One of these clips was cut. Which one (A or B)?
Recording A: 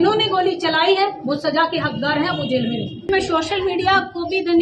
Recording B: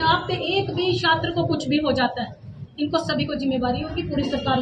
A